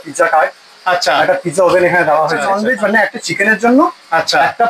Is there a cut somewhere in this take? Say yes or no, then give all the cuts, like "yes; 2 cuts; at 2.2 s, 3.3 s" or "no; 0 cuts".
yes; 1 cut; at 2.4 s